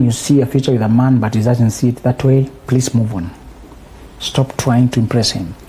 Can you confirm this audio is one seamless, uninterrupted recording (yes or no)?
yes